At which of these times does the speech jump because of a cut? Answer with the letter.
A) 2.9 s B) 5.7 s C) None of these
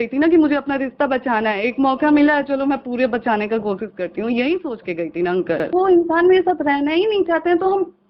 B